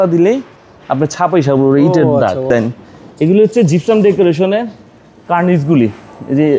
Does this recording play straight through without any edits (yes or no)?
no